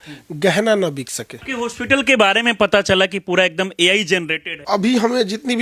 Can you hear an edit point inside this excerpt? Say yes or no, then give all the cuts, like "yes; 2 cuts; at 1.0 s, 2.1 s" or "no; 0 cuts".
yes; 2 cuts; at 1.4 s, 4.5 s